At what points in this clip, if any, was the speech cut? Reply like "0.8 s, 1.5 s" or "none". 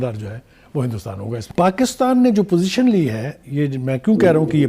1.5 s

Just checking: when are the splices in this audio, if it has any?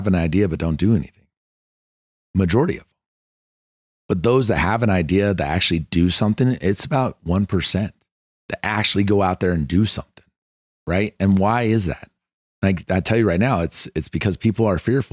none

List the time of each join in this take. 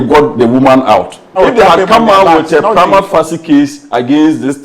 1.3 s

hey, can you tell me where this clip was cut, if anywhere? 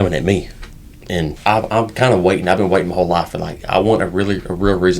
1.3 s

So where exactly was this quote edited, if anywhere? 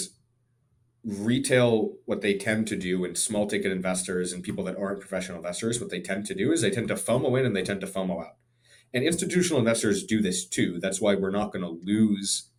none

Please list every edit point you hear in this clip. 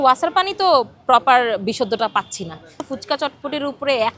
2.8 s

